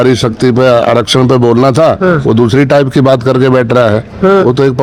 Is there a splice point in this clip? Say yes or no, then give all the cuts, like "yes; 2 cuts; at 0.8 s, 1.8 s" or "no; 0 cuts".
no; 0 cuts